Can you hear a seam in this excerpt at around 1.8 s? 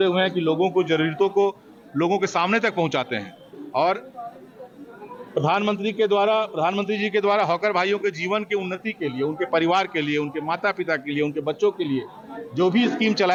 no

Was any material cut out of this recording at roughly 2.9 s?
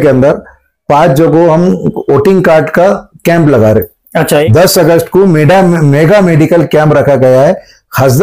no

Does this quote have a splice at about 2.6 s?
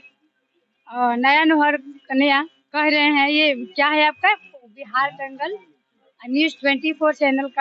yes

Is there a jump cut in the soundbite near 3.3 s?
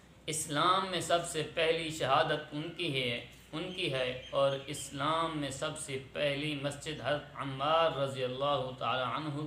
no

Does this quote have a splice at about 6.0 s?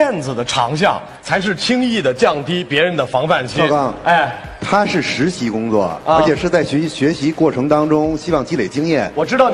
no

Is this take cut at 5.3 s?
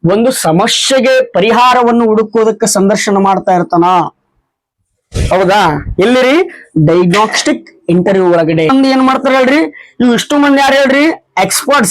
no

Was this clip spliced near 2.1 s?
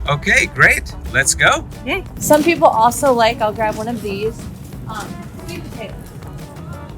yes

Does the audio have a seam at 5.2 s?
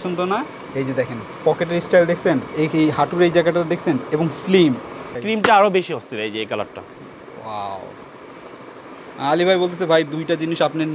yes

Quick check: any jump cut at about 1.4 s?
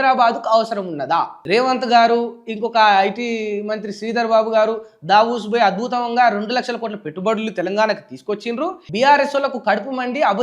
yes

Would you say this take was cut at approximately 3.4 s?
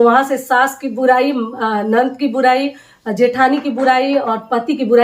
no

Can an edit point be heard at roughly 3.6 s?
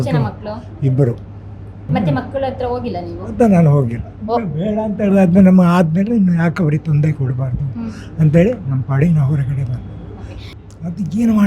no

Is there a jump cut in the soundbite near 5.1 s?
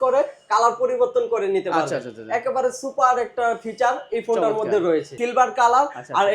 yes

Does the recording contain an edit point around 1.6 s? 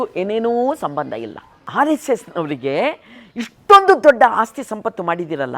yes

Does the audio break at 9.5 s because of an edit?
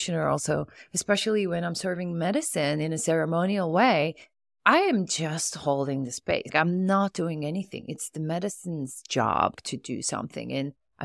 yes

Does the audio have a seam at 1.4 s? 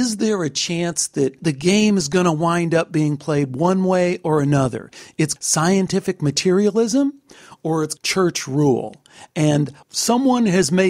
yes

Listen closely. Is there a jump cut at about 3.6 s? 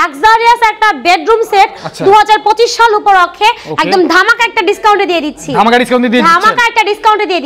no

